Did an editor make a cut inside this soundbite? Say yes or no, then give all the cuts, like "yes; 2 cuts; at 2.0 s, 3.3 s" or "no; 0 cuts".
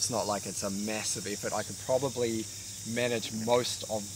no; 0 cuts